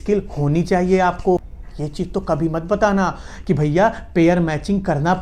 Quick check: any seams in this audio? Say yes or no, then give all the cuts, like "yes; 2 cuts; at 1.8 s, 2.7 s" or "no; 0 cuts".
yes; 1 cut; at 1.4 s